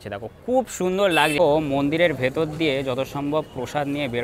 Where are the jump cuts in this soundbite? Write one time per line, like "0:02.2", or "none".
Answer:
0:01.3